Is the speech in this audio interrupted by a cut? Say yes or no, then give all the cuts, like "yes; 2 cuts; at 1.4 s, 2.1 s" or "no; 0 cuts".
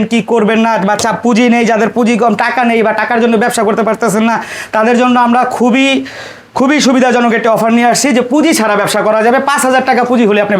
no; 0 cuts